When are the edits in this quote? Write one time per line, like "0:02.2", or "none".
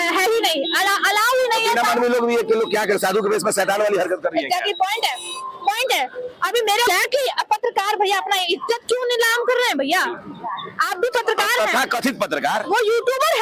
0:06.9